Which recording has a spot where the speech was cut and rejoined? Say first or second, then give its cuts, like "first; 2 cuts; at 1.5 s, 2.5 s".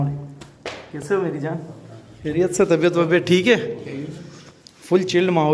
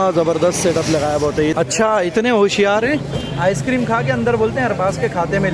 second; 1 cut; at 1.5 s